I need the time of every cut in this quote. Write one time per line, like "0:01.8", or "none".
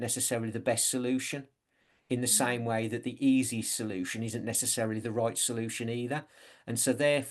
none